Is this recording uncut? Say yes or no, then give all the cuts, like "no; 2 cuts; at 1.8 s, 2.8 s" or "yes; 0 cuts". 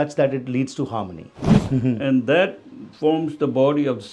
no; 1 cut; at 1.5 s